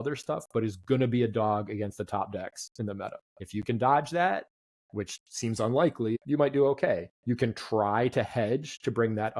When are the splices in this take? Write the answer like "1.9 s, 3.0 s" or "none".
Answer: 3.3 s, 6.2 s, 7.1 s